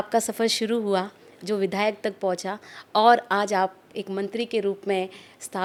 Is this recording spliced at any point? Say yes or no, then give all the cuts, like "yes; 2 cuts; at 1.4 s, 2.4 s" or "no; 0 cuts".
no; 0 cuts